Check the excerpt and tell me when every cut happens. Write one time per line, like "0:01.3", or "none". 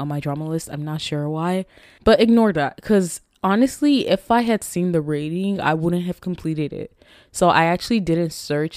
none